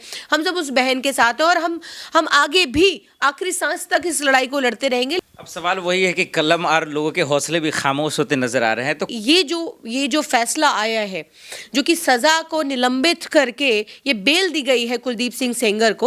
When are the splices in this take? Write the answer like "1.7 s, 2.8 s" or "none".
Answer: 5.2 s, 9.2 s